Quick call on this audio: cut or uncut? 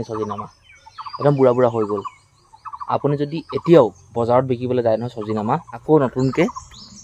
cut